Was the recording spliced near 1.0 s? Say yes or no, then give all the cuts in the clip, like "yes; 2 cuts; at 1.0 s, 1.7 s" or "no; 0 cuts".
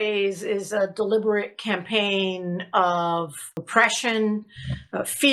no; 1 cut; at 3.5 s